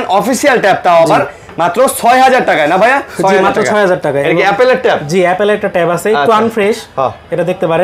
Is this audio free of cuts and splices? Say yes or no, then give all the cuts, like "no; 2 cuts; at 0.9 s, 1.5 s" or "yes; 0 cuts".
yes; 0 cuts